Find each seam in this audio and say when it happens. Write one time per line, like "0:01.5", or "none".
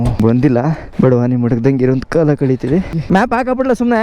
0:00.9
0:03.0